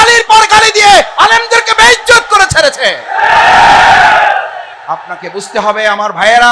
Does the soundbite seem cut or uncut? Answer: cut